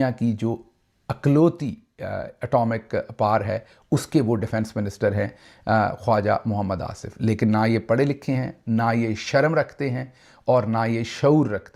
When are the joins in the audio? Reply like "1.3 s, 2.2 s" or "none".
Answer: none